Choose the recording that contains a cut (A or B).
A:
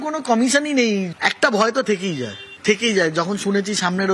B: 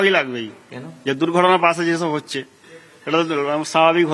A